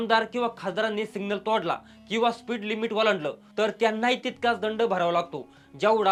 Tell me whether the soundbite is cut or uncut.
uncut